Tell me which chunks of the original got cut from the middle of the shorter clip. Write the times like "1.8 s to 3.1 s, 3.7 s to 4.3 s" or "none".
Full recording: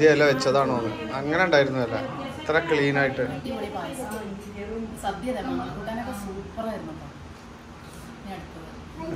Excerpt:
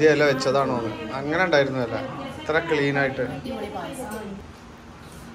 4.5 s to 7.3 s